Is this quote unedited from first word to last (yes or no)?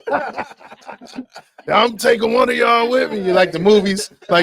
yes